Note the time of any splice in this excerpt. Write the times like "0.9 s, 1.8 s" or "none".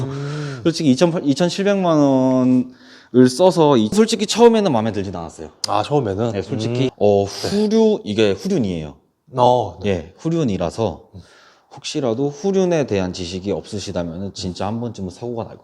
3.9 s, 6.9 s